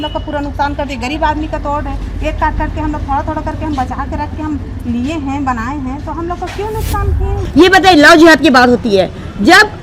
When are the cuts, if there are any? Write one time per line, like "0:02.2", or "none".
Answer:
0:07.4